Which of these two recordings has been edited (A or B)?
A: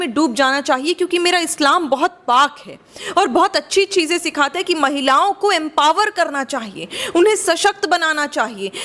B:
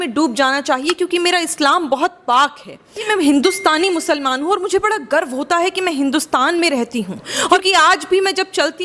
B